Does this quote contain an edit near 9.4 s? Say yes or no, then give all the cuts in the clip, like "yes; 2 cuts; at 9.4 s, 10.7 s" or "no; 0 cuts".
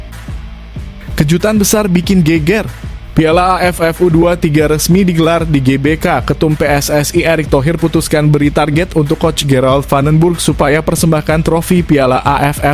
no; 1 cut; at 1.1 s